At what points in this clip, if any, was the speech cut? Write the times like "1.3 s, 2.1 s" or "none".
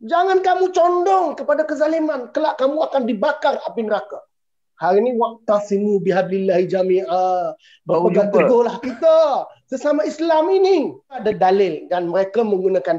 11.2 s